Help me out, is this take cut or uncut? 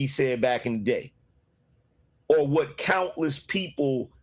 uncut